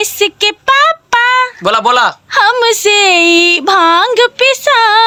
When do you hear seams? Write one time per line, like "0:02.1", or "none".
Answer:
none